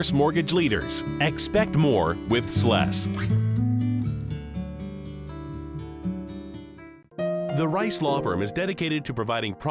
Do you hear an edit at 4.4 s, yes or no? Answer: no